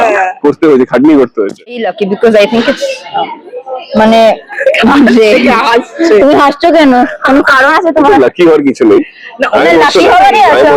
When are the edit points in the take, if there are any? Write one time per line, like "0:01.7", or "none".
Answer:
0:01.8